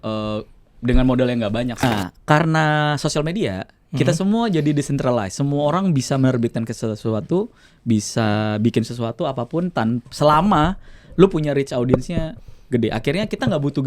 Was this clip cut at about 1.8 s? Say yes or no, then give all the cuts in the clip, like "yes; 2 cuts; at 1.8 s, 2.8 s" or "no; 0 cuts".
yes; 1 cut; at 1.8 s